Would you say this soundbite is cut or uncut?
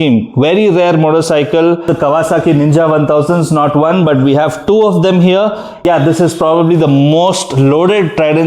cut